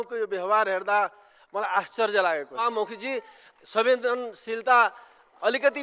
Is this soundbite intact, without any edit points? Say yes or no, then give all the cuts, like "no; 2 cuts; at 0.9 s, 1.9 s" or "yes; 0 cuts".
no; 1 cut; at 2.7 s